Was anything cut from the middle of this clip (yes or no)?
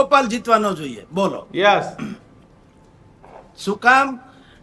no